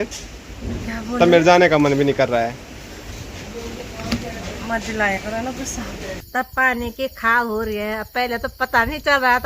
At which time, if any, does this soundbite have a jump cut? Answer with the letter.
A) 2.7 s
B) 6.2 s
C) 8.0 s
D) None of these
B